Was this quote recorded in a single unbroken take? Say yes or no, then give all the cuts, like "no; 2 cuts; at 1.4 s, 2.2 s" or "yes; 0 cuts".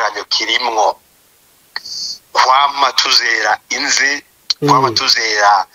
yes; 0 cuts